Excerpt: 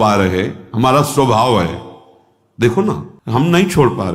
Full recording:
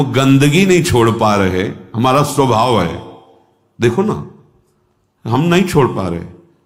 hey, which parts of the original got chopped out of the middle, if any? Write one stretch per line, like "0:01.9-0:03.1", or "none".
0:04.3-0:05.1